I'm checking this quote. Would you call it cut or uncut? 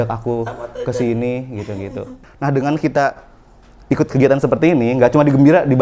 cut